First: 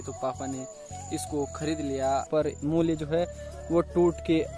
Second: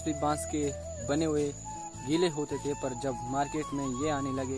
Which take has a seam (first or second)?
first